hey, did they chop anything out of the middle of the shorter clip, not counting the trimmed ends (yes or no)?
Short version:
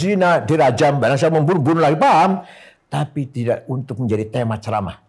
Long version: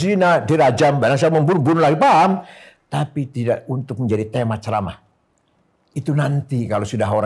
no